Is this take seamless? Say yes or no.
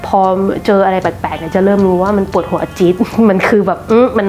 yes